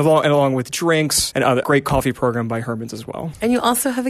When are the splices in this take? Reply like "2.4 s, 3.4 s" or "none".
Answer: 3.2 s